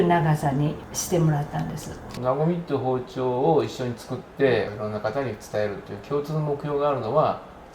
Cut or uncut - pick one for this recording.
cut